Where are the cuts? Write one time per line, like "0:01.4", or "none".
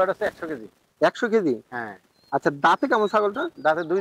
none